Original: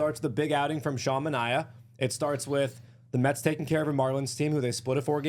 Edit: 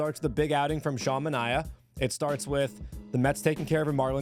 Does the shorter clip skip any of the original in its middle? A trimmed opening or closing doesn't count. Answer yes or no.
no